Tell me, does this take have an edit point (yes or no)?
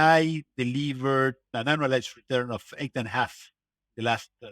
yes